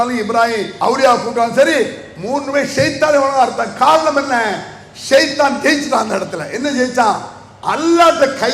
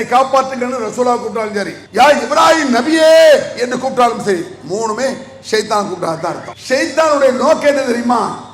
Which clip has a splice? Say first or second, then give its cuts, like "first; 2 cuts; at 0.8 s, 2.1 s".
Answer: second; 2 cuts; at 1.8 s, 6.5 s